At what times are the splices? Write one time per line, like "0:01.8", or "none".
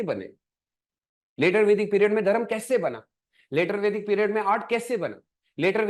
none